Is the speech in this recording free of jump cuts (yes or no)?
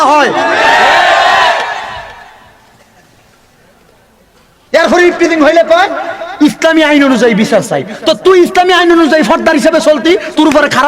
yes